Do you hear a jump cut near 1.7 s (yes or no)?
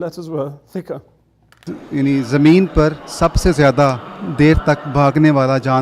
yes